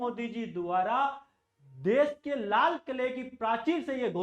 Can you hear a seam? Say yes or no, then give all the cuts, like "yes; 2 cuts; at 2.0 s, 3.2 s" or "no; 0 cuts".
no; 0 cuts